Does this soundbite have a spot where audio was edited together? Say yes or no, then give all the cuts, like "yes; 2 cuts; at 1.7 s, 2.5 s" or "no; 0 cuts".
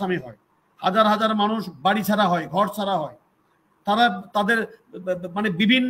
no; 0 cuts